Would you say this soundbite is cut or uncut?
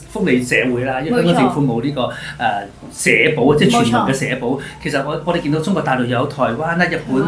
uncut